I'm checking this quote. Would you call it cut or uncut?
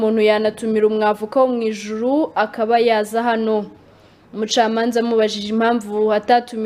uncut